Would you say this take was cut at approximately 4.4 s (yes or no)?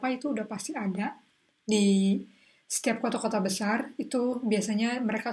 no